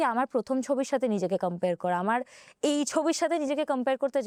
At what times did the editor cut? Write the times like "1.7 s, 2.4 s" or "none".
none